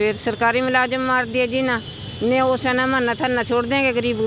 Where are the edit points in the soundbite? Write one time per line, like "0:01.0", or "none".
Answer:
none